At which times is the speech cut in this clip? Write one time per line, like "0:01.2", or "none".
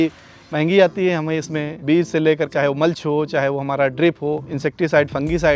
0:01.7
0:02.5
0:04.5